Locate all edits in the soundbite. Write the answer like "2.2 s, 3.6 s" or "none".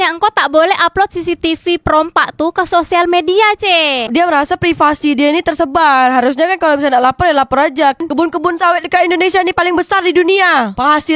8.0 s